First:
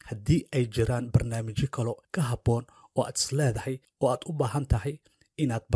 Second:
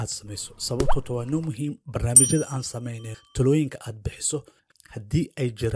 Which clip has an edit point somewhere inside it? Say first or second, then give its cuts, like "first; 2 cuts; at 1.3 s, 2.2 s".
first; 2 cuts; at 2.0 s, 3.9 s